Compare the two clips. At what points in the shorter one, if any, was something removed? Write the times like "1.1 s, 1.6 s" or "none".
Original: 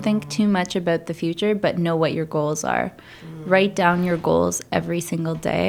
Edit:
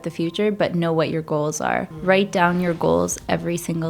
1.9 s